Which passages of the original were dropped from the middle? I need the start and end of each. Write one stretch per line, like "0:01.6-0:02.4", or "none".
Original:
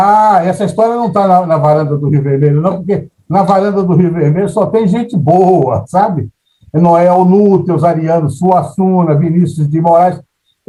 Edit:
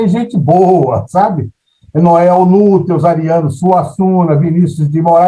none